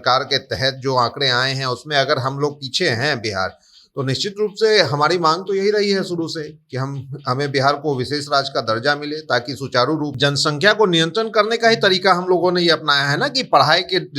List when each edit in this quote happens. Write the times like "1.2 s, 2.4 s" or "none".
10.1 s